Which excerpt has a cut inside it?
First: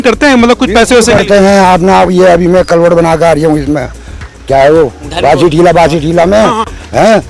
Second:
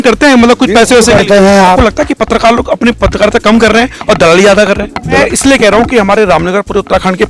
second; 2 cuts; at 1.8 s, 5.2 s

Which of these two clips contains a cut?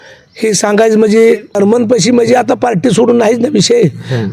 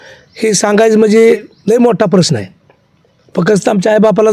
first; 1 cut; at 1.6 s

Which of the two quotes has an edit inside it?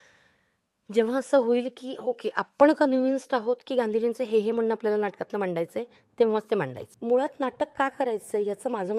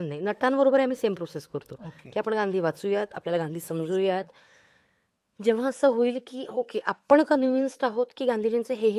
first; 1 cut; at 6.8 s

